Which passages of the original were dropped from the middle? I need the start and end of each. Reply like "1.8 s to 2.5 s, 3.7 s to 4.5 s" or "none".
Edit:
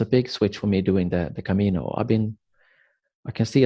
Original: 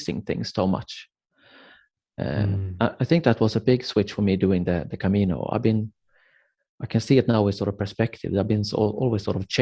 none